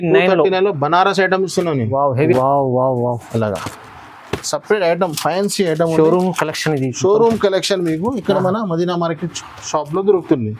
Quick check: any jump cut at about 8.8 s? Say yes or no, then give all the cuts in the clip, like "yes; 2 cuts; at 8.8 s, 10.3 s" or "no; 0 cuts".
no; 1 cut; at 2.3 s